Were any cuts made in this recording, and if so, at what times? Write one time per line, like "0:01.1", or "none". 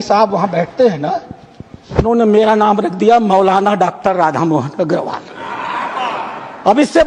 none